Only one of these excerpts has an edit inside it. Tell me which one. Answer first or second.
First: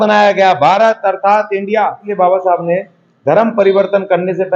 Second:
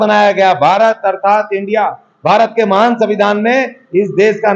first